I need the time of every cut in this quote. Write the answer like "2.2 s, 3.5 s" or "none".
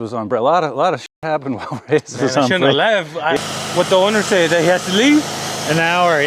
3.4 s